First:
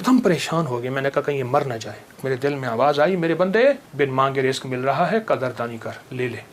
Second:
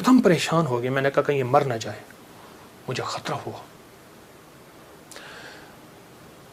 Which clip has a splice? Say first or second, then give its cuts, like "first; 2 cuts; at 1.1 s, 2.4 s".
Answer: first; 2 cuts; at 2.2 s, 3.9 s